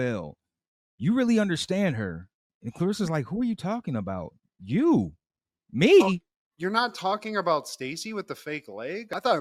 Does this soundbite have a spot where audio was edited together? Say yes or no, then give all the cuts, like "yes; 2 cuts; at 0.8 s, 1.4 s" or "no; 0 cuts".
no; 0 cuts